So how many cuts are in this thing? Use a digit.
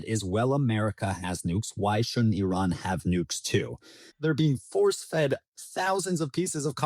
1